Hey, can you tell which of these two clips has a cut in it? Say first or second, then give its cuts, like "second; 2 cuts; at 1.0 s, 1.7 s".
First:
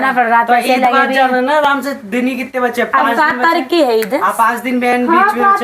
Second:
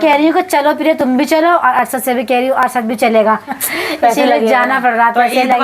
second; 1 cut; at 3.6 s